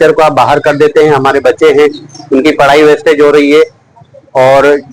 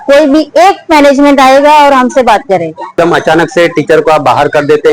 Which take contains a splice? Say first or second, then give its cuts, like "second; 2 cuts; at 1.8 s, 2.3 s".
second; 1 cut; at 2.9 s